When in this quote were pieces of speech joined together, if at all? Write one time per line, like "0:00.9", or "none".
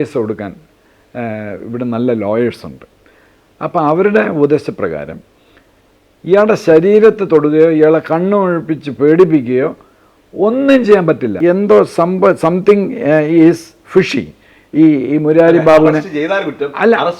0:11.4